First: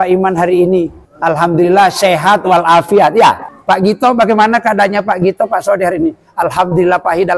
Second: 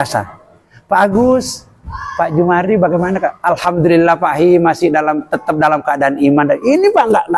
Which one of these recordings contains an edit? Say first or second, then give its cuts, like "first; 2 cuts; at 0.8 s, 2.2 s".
first; 2 cuts; at 1.0 s, 3.5 s